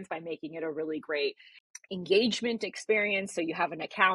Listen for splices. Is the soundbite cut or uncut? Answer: uncut